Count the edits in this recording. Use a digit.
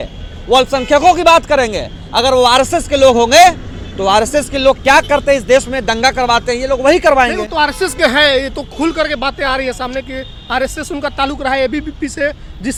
0